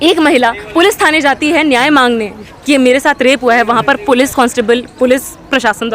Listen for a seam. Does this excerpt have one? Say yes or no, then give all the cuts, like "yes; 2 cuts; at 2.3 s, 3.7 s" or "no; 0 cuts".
no; 0 cuts